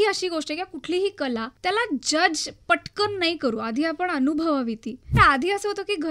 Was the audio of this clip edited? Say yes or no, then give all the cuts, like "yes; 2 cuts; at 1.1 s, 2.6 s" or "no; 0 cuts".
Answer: yes; 2 cuts; at 1.5 s, 5.1 s